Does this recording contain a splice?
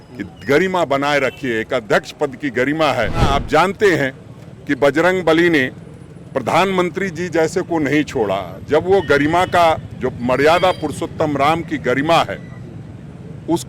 yes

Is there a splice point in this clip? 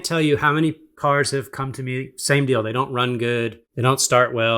yes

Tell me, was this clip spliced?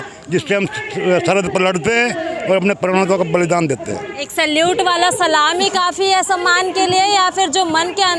no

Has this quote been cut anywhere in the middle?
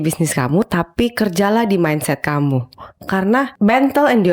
no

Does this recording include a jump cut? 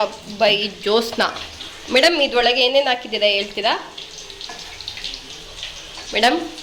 no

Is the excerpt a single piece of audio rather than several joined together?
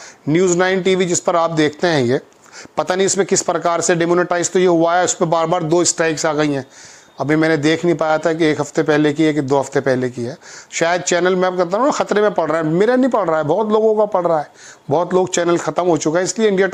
yes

